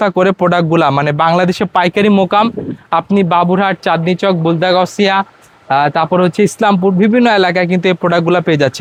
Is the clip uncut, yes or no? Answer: yes